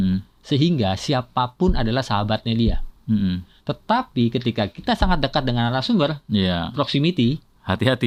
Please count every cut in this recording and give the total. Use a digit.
0